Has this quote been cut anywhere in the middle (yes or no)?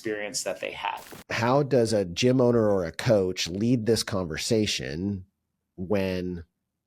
yes